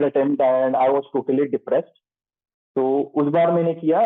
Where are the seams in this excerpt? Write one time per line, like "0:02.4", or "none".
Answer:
none